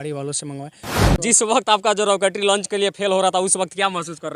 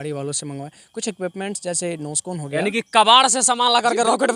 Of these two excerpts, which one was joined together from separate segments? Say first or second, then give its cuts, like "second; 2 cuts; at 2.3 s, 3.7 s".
first; 1 cut; at 1.2 s